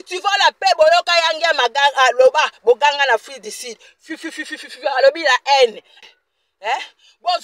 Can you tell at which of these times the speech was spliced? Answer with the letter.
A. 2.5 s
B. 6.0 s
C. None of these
B